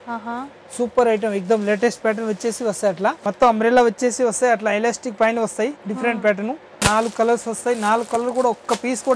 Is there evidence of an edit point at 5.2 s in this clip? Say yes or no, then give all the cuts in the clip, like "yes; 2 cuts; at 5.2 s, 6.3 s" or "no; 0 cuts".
no; 2 cuts; at 3.2 s, 6.8 s